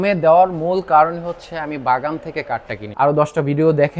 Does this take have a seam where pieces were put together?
yes; 1 cut; at 2.8 s

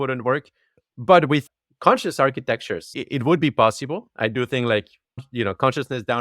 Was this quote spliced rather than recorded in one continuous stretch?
yes; 3 cuts; at 1.4 s, 3.0 s, 5.3 s

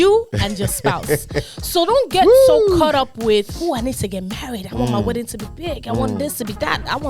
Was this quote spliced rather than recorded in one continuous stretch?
no; 0 cuts

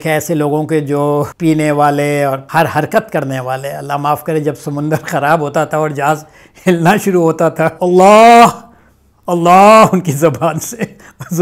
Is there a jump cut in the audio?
yes; 3 cuts; at 1.3 s, 2.4 s, 7.8 s

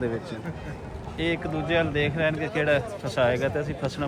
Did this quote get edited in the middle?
no; 0 cuts

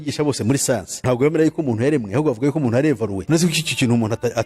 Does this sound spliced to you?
yes; 2 cuts; at 1.0 s, 3.2 s

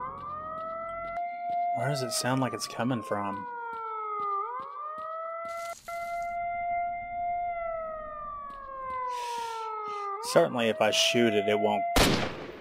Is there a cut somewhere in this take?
yes; 1 cut; at 1.2 s

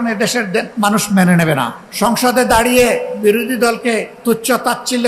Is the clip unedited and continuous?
no; 2 cuts; at 1.8 s, 4.1 s

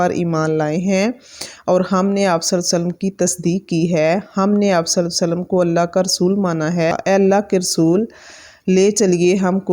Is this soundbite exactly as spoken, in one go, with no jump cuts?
no; 1 cut; at 6.9 s

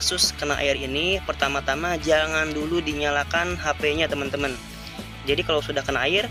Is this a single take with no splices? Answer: yes; 0 cuts

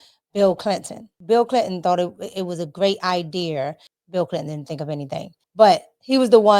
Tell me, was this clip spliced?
yes; 1 cut; at 3.9 s

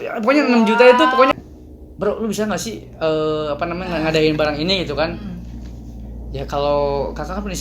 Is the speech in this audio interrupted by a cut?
yes; 1 cut; at 1.3 s

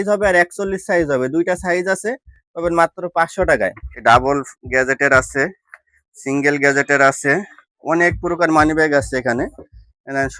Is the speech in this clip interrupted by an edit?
yes; 1 cut; at 3.9 s

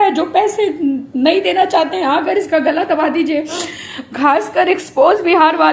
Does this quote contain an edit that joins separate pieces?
no; 0 cuts

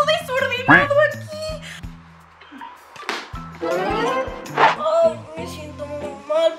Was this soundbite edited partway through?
yes; 2 cuts; at 1.8 s, 4.7 s

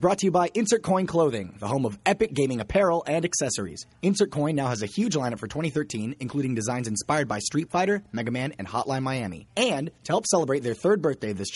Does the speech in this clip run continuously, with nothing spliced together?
yes; 0 cuts

